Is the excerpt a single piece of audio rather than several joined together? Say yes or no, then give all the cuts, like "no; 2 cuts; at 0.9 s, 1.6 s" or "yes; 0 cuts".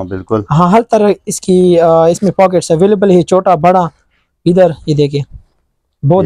yes; 0 cuts